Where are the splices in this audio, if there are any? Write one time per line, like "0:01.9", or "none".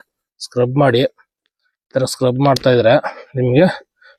none

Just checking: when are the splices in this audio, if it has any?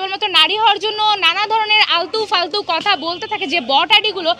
none

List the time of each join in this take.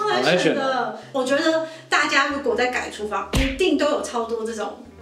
0:01.0

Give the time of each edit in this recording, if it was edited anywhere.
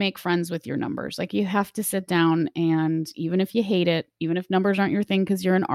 none

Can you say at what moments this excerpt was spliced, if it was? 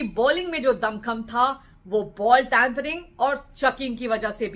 none

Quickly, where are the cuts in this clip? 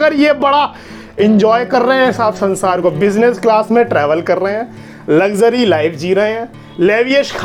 none

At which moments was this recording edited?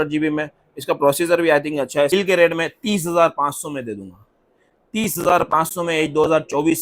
0:02.1

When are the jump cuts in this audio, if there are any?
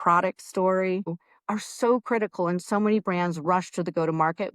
0:01.2

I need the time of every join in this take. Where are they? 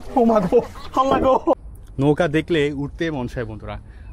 0:01.6

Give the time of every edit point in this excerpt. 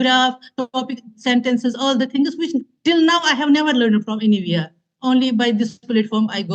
none

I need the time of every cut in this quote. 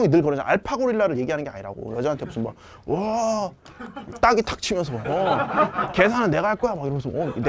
none

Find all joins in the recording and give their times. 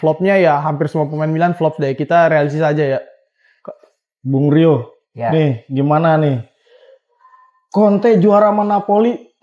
none

